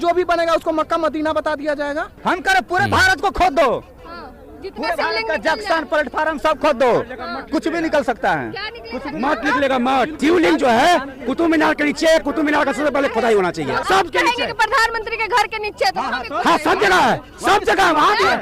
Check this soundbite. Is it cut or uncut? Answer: cut